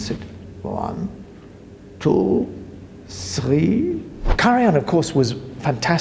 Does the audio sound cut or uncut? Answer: cut